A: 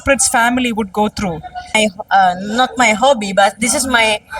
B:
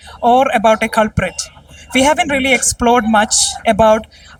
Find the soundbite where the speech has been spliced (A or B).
A